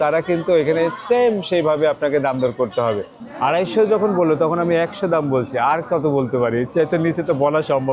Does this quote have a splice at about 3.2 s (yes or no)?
yes